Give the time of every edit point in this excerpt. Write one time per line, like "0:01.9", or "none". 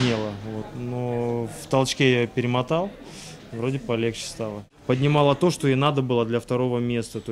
0:04.7